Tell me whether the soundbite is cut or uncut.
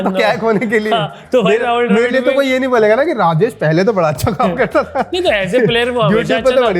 uncut